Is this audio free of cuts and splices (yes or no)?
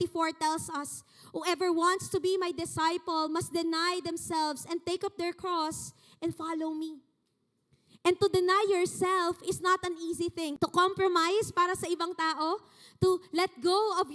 no